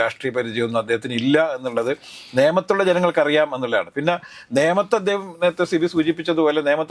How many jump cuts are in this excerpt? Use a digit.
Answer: 0